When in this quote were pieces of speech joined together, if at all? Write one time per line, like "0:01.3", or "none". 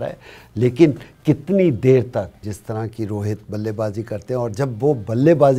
0:02.5